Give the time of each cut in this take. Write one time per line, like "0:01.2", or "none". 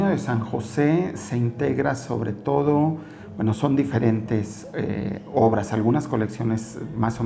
none